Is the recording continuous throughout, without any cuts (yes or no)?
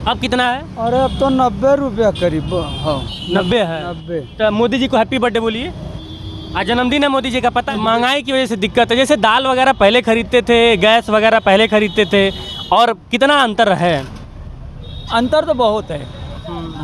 no